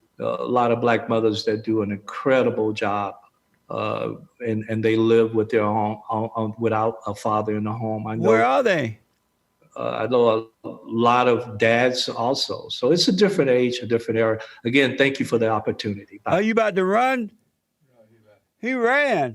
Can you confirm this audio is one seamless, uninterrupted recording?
yes; 0 cuts

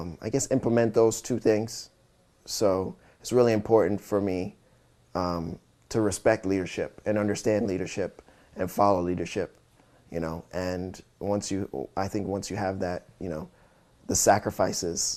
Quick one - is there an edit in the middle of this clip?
no; 0 cuts

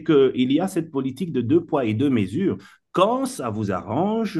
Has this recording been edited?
no; 0 cuts

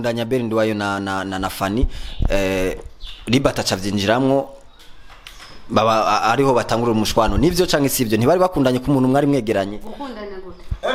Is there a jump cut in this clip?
no; 0 cuts

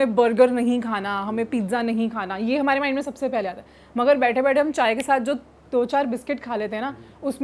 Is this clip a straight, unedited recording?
yes; 0 cuts

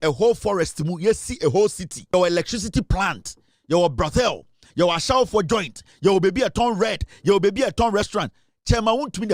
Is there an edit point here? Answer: yes; 1 cut; at 2.1 s

